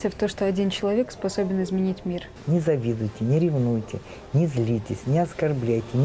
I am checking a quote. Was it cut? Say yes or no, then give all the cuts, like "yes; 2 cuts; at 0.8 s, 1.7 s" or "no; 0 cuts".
yes; 1 cut; at 2.3 s